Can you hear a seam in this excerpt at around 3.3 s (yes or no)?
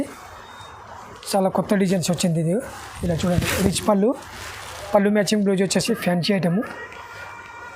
no